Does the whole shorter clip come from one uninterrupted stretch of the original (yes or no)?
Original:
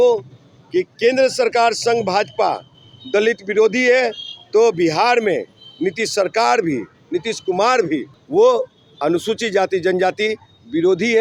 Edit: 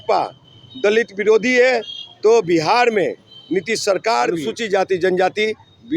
no